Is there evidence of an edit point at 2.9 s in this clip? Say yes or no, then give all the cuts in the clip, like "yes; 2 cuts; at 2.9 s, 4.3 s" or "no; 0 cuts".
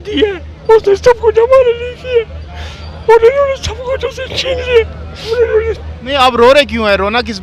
no; 1 cut; at 5.3 s